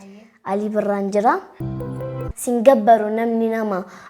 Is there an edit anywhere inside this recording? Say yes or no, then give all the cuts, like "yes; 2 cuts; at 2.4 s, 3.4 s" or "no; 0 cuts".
yes; 1 cut; at 2.1 s